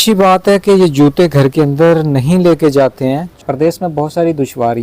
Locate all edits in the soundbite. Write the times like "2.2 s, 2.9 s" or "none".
3.3 s

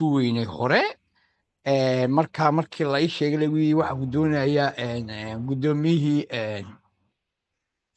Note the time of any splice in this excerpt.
none

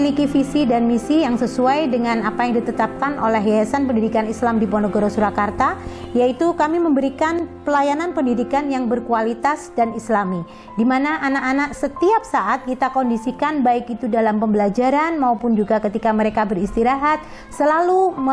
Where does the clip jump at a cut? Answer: none

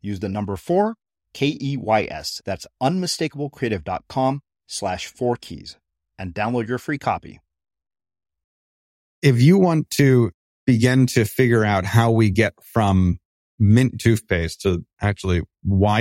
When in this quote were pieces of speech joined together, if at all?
9.1 s, 10.3 s

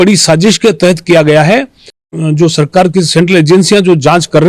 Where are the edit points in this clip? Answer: 2.1 s

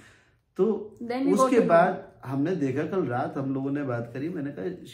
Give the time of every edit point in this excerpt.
none

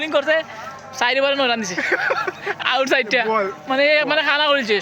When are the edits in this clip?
none

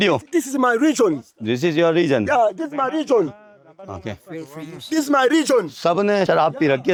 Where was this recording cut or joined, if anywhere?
none

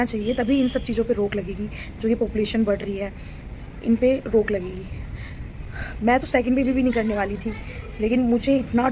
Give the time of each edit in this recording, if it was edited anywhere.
none

